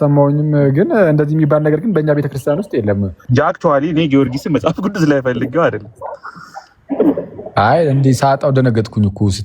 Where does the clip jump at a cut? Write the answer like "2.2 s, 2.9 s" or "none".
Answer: 3.2 s